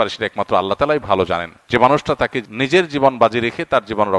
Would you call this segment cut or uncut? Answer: cut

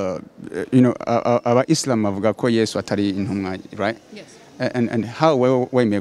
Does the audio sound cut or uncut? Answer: uncut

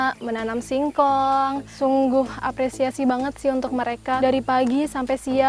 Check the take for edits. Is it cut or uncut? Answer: cut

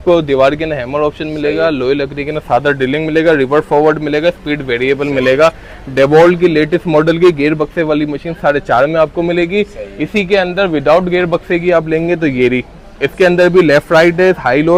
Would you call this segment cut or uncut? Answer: uncut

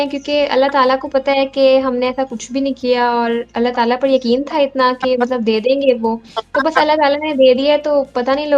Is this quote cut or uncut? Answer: uncut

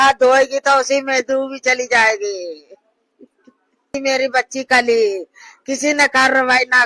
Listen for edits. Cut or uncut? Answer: cut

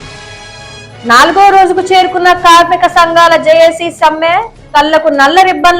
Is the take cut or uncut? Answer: cut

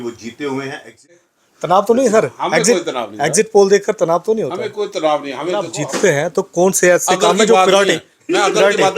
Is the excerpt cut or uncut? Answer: cut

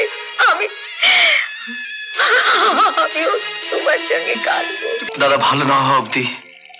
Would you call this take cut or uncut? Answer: cut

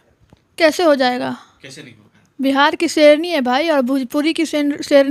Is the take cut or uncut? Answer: uncut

